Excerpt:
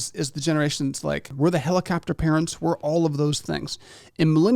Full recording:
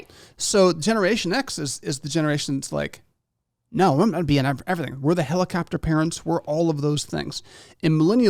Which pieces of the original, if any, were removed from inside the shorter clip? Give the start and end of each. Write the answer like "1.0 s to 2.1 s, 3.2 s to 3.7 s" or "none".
3.0 s to 4.9 s